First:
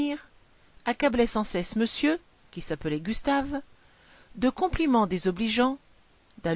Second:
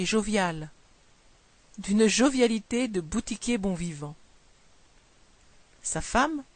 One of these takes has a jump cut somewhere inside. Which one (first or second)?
second